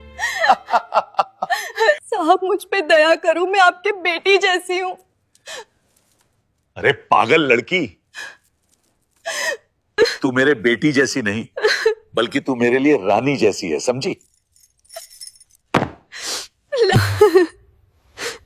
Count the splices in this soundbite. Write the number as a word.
one